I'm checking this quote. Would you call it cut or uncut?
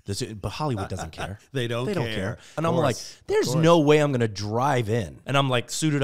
cut